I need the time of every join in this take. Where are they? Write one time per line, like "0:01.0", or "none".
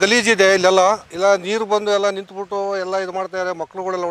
0:01.1